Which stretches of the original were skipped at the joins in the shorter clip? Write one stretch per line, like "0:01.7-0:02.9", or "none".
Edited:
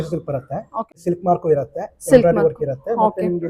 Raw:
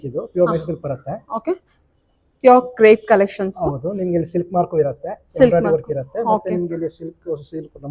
0:01.5-0:04.2